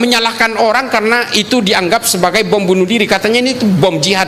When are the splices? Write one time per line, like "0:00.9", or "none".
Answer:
none